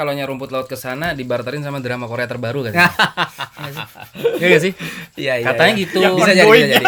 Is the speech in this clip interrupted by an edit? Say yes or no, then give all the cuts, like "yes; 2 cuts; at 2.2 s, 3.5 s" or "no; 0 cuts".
no; 0 cuts